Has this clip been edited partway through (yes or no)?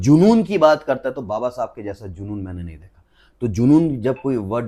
no